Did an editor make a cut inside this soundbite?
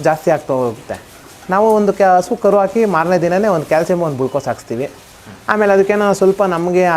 no; 0 cuts

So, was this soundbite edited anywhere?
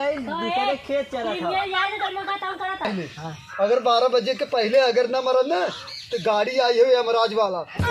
yes; 1 cut; at 2.9 s

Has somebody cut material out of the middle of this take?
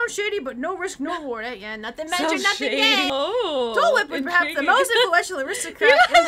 yes; 1 cut; at 3.1 s

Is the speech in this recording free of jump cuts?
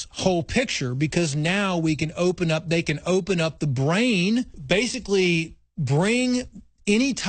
no; 1 cut; at 4.6 s

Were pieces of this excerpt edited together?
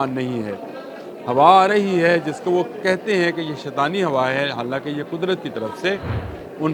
no; 0 cuts

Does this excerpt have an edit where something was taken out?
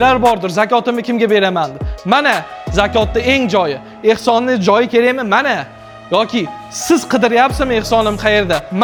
no; 0 cuts

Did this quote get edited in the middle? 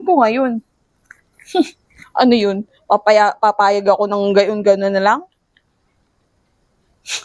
no; 0 cuts

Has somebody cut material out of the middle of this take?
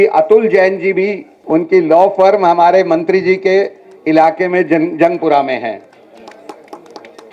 yes; 1 cut; at 1.3 s

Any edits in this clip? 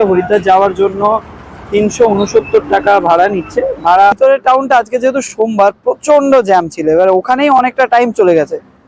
yes; 1 cut; at 4.1 s

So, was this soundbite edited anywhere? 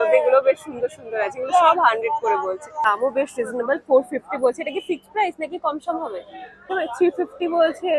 yes; 2 cuts; at 2.8 s, 6.7 s

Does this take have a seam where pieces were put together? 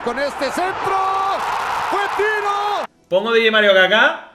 yes; 1 cut; at 2.9 s

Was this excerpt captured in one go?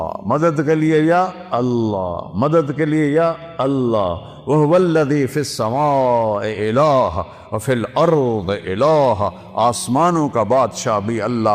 yes; 0 cuts

